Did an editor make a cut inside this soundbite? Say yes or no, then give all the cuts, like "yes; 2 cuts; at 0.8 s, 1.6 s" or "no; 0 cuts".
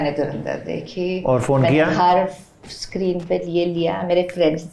no; 0 cuts